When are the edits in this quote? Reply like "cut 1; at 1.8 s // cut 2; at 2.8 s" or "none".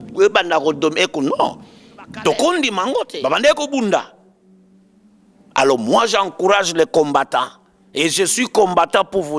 cut 1; at 3.1 s

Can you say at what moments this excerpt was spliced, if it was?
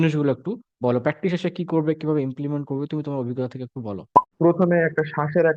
cut 1; at 4.2 s

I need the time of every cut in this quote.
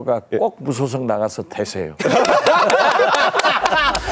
none

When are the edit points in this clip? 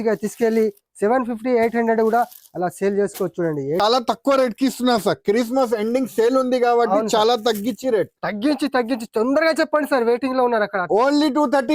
cut 1; at 3.8 s

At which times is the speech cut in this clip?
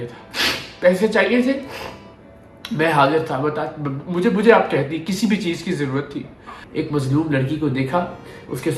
cut 1; at 6.6 s

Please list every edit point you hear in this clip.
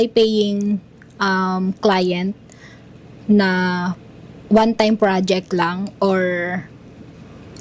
none

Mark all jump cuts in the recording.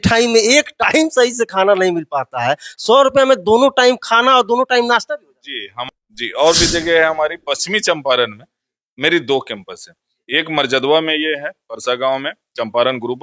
cut 1; at 5.7 s

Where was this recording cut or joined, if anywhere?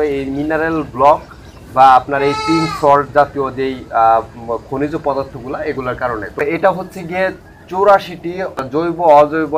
cut 1; at 6.4 s // cut 2; at 8.6 s

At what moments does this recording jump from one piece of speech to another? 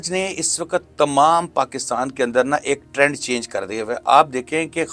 none

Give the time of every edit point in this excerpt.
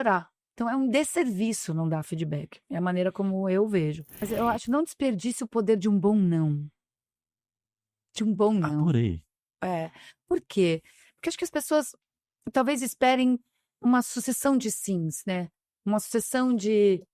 cut 1; at 4.3 s

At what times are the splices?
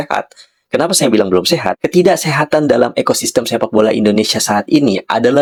none

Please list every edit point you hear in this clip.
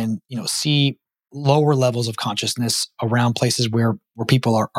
none

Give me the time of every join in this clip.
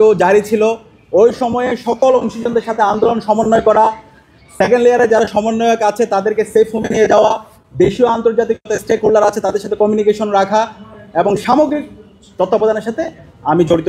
none

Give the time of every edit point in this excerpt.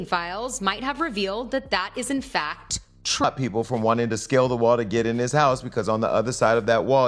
cut 1; at 3.2 s

